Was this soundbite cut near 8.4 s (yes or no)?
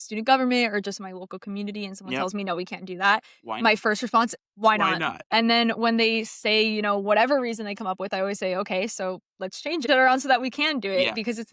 no